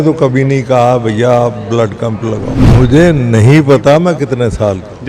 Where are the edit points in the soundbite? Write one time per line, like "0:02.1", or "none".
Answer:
0:02.6

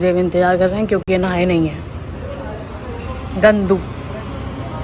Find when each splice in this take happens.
none

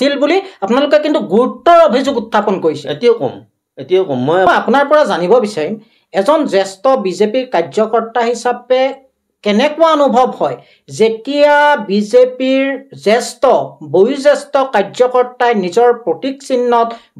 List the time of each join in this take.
0:04.5

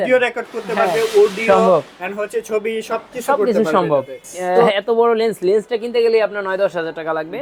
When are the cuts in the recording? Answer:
0:04.7

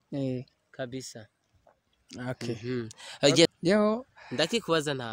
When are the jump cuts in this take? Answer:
0:03.6

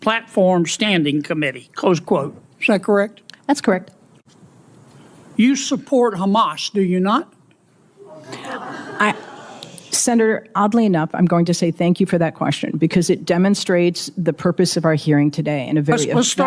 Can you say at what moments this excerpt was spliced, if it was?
0:04.1

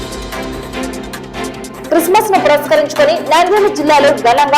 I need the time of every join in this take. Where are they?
0:01.8

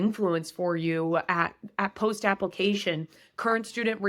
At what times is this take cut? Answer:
none

